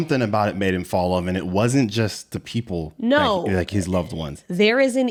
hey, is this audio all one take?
yes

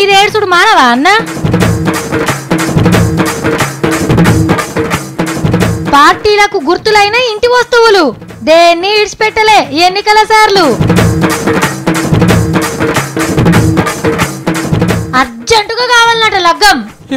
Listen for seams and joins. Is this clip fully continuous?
no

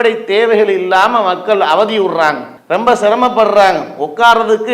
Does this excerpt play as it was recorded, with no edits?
no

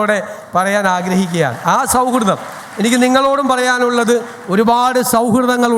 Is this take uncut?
yes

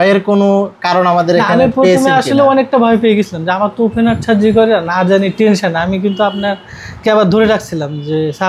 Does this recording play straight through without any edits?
yes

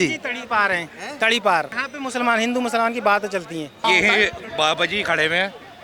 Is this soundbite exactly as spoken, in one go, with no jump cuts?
no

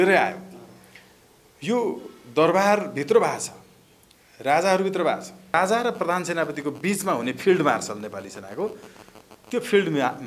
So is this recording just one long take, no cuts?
no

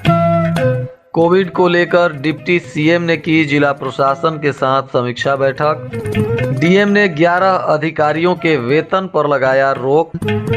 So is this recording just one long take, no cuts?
no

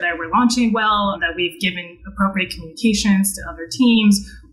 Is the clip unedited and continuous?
yes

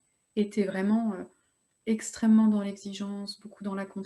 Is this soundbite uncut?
yes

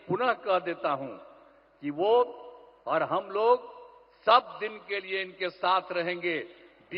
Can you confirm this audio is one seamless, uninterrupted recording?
yes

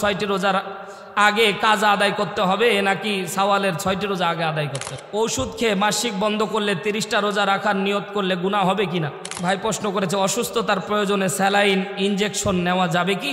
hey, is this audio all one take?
no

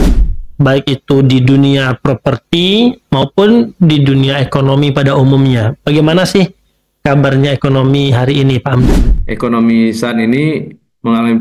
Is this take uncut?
no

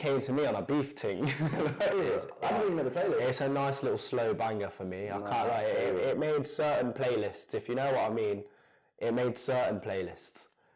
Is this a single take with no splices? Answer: no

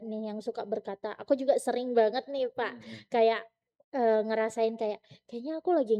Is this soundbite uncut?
yes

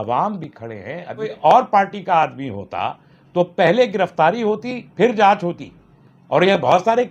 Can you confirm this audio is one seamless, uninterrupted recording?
no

